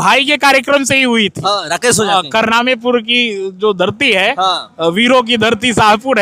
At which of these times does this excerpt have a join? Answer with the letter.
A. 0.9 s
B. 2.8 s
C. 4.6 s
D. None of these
D